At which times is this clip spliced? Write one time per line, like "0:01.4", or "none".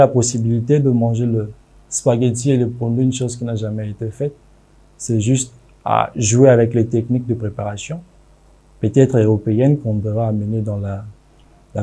none